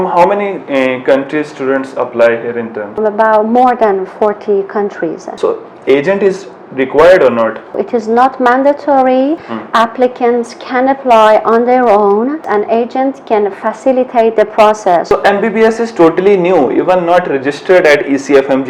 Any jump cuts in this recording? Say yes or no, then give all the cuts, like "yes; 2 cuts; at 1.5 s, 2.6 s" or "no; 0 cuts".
yes; 6 cuts; at 3.0 s, 5.2 s, 7.8 s, 9.5 s, 12.4 s, 15.1 s